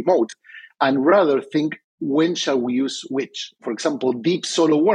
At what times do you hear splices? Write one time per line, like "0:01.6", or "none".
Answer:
0:03.7